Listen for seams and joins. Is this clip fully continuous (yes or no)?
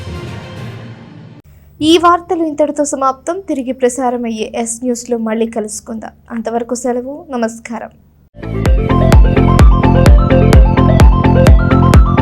yes